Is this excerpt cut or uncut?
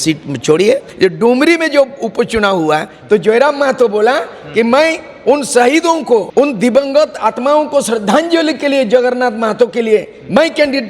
cut